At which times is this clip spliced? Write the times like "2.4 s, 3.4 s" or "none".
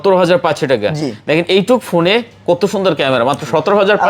none